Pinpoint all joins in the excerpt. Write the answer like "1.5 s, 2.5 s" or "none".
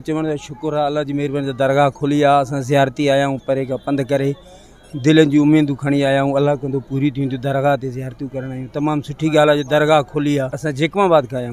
none